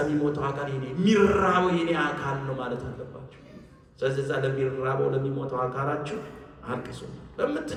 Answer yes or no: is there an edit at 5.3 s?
no